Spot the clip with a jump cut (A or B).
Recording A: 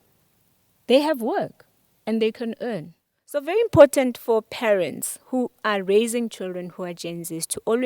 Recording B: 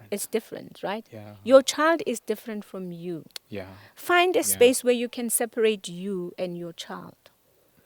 A